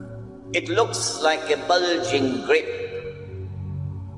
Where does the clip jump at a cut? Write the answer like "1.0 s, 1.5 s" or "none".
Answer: 3.2 s